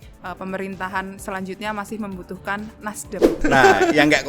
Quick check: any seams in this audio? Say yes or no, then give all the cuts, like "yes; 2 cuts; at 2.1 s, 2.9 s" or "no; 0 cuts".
yes; 1 cut; at 3.4 s